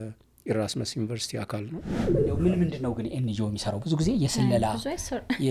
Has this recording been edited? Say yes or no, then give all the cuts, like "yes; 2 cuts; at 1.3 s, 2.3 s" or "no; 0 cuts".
yes; 1 cut; at 1.9 s